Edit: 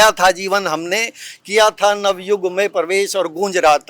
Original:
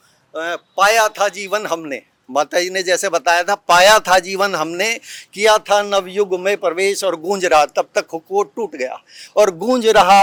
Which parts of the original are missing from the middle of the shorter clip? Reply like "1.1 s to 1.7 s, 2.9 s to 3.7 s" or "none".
none